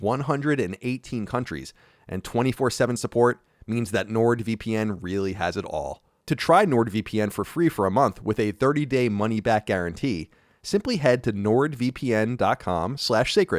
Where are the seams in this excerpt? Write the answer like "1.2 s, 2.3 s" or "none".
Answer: 6.2 s